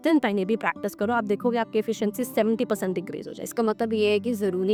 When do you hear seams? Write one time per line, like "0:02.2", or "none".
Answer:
none